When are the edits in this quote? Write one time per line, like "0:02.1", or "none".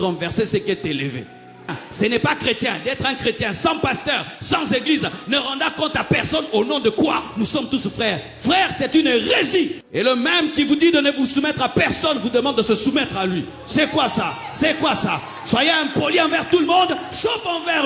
0:01.8
0:09.8